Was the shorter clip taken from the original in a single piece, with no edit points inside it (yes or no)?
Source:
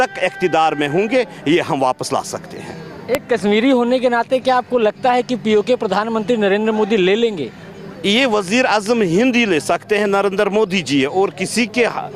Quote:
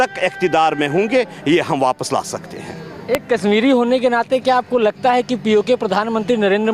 yes